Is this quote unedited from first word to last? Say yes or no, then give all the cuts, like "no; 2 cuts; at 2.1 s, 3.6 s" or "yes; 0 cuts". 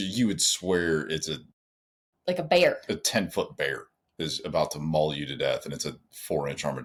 yes; 0 cuts